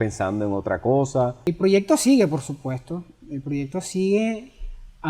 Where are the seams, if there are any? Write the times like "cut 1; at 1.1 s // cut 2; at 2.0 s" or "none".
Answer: cut 1; at 1.4 s